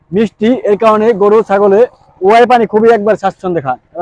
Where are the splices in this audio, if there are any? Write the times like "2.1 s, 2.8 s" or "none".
none

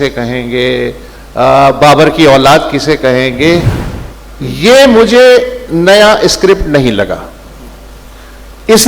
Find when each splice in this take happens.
3.8 s

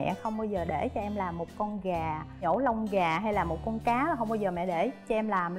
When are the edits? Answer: none

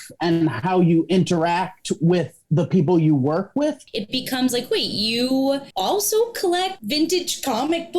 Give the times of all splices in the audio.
3.9 s, 5.7 s, 6.8 s

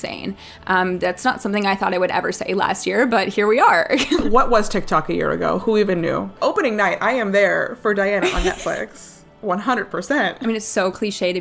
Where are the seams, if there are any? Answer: 4.2 s, 6.3 s, 10.4 s

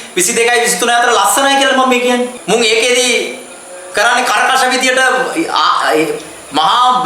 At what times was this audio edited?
2.3 s

